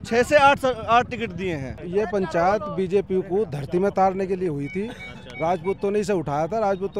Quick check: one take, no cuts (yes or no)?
no